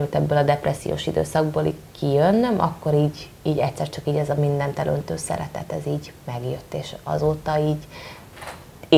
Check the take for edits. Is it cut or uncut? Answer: uncut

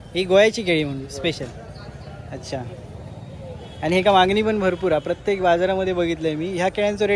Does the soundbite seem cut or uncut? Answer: uncut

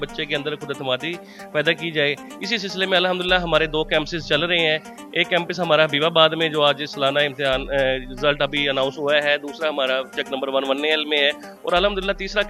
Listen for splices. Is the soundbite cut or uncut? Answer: uncut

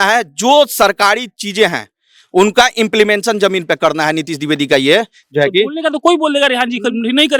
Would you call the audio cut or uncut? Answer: uncut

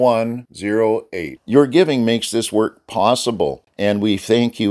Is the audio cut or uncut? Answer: cut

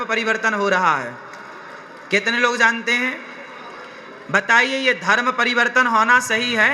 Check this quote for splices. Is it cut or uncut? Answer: uncut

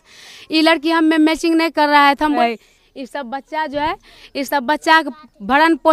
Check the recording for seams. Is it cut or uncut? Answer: cut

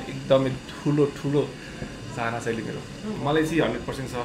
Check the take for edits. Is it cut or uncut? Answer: cut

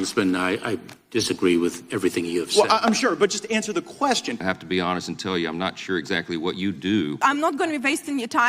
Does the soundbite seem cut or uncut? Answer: cut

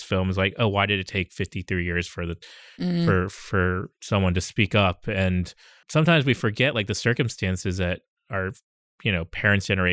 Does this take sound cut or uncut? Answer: cut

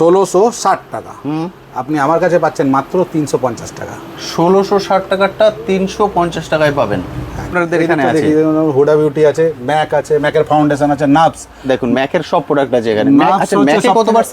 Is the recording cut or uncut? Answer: cut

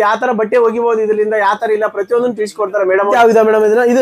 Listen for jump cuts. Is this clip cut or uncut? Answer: cut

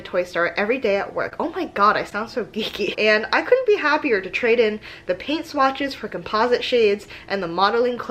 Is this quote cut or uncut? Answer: cut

